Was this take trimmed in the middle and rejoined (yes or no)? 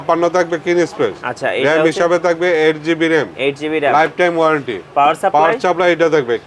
no